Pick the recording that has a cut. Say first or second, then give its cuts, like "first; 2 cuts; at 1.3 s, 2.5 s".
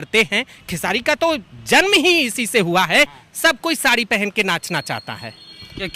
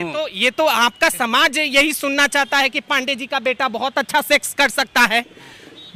first; 1 cut; at 3.2 s